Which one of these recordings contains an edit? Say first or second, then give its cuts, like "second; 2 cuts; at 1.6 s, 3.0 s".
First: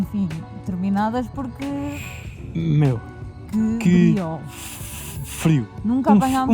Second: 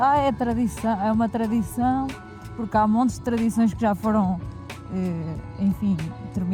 first; 1 cut; at 2.1 s